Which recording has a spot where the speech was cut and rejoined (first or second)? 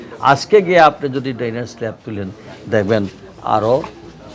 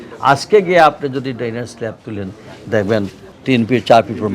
second